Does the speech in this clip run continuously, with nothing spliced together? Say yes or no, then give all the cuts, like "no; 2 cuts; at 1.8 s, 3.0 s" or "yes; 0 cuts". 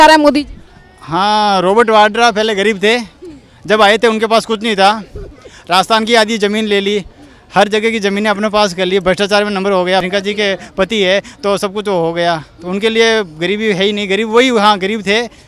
yes; 0 cuts